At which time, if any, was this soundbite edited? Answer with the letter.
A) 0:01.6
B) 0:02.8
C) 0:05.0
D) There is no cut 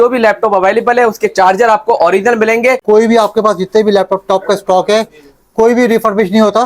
B